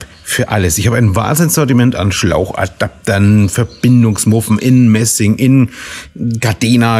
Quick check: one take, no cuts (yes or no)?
yes